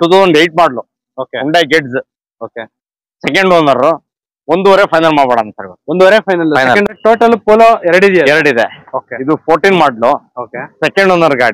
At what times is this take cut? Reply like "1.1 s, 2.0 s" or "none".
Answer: 6.9 s